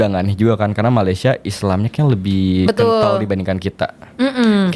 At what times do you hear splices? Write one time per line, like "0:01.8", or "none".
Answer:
none